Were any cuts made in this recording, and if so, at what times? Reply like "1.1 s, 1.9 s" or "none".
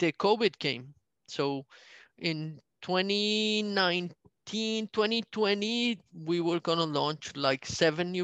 none